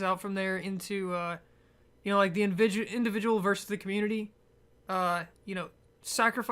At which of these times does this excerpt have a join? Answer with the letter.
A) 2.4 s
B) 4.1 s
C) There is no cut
B